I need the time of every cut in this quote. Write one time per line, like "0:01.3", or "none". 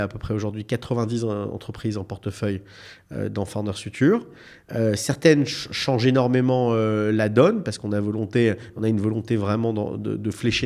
none